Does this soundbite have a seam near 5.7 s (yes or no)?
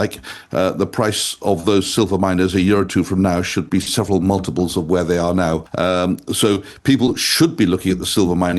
yes